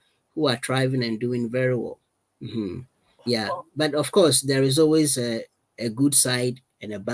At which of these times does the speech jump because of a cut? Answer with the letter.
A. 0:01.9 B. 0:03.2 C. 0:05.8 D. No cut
B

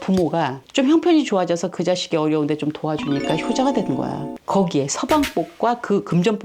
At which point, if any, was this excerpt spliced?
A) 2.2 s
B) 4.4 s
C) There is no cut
B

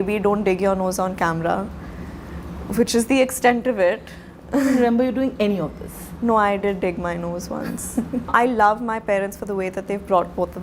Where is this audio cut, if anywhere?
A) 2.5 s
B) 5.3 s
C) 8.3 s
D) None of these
C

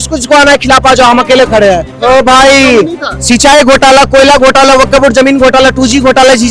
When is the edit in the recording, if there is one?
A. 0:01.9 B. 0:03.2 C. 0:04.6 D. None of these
A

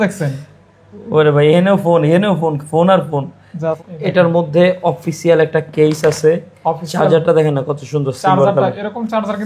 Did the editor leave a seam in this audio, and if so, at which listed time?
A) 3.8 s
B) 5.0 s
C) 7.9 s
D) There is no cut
A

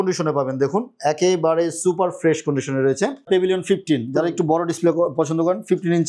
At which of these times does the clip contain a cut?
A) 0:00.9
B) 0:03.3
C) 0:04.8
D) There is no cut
B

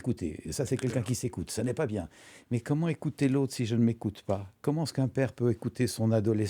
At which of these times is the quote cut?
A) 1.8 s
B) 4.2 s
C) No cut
C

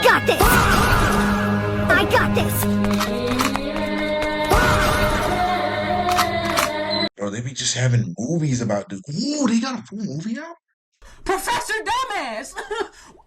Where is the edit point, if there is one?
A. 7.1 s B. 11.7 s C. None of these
A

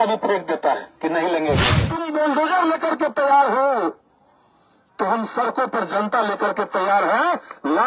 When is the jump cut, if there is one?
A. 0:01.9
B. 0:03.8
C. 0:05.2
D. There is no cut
A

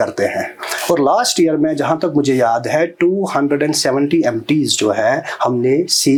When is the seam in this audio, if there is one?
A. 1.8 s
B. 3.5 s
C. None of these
C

